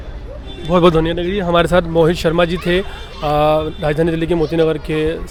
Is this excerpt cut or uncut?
uncut